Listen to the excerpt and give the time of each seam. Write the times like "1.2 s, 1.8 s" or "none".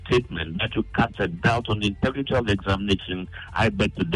none